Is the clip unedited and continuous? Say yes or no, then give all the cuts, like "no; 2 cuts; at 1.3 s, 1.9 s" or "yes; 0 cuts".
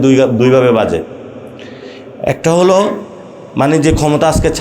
yes; 0 cuts